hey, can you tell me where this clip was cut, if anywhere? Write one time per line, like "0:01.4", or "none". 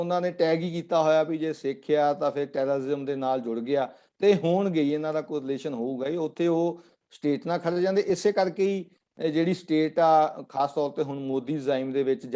none